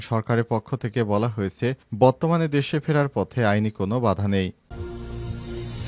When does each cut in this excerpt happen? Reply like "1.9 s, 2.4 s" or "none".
4.7 s